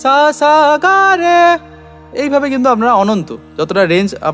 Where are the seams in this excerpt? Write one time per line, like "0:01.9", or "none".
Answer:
none